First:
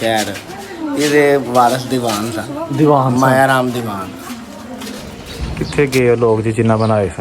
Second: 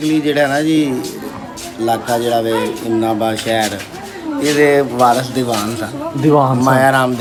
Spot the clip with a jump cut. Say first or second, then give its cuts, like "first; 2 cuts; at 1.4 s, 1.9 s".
first; 1 cut; at 5.3 s